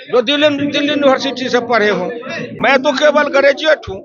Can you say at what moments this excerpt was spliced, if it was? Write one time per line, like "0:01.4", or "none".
0:02.6